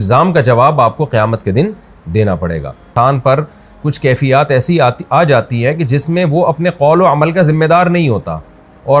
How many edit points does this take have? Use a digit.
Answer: 1